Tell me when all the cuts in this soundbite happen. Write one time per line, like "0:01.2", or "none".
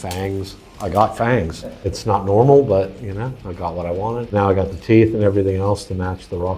0:01.9